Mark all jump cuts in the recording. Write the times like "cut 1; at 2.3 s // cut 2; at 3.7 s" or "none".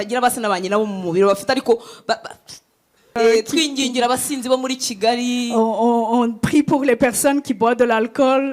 cut 1; at 3.2 s